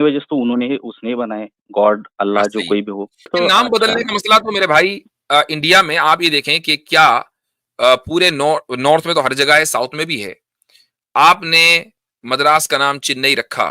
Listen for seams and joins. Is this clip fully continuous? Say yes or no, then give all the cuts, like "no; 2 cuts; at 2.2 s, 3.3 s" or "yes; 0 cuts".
no; 1 cut; at 3.1 s